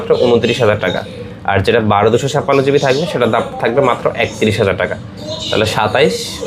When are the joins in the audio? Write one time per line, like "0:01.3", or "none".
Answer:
none